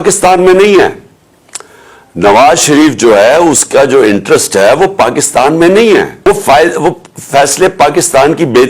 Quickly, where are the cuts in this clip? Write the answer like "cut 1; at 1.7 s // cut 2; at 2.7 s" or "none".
cut 1; at 6.1 s